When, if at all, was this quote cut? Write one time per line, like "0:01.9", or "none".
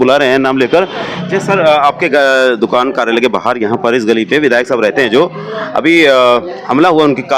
0:01.1